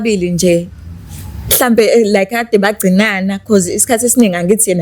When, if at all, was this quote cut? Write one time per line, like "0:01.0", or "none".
none

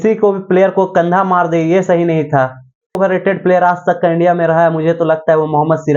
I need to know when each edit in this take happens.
0:03.0

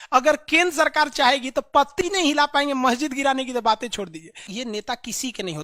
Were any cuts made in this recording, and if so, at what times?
0:04.5

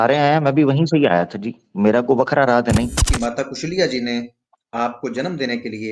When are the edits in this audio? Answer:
0:03.1

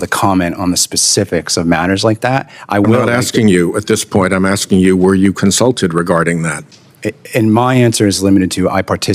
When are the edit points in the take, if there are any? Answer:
none

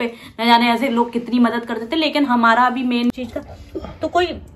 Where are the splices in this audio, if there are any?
0:03.1

